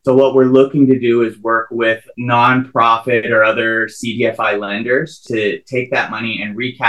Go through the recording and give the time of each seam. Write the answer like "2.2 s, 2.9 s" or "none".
2.1 s, 5.2 s